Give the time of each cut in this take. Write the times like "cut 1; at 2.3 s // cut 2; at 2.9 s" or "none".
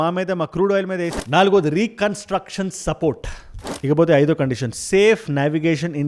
cut 1; at 1.1 s // cut 2; at 3.6 s